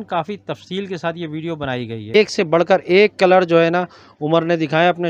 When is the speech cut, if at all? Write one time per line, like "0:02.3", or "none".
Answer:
0:02.2